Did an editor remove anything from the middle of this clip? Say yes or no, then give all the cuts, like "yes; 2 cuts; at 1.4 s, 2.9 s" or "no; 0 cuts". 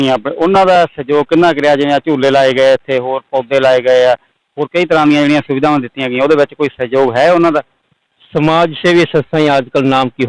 no; 0 cuts